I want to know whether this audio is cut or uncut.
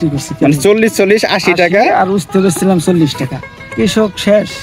cut